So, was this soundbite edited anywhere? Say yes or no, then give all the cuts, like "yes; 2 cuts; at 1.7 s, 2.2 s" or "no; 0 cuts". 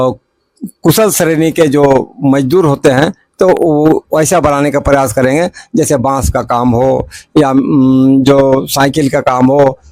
no; 0 cuts